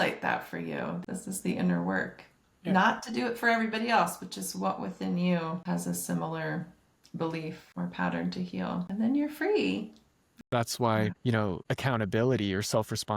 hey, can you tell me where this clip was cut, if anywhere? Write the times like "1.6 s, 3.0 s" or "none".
1.0 s, 5.6 s, 7.6 s, 8.9 s, 10.3 s